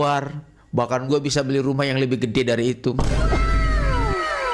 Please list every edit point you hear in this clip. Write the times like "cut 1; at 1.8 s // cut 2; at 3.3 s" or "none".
none